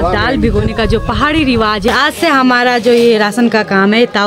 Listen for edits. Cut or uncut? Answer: cut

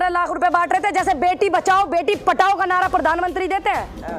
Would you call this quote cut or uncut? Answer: uncut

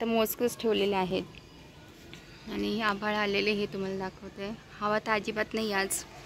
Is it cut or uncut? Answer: uncut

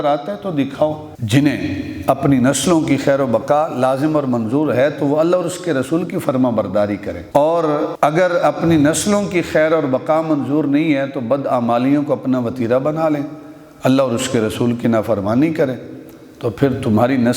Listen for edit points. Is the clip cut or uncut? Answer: cut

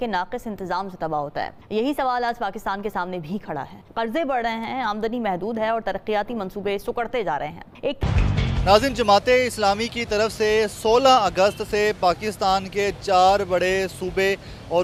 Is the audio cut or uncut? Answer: uncut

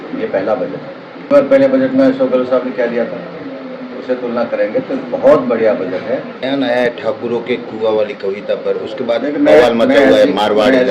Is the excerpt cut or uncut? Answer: cut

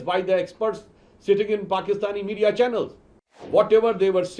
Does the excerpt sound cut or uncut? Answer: cut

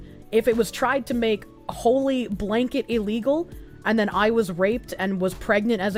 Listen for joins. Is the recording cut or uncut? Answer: uncut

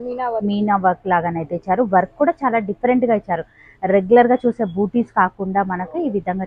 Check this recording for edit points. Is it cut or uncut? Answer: uncut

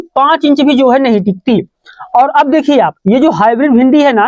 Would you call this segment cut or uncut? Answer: uncut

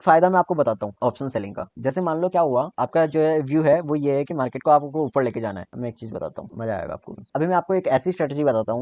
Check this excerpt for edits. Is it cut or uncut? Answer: uncut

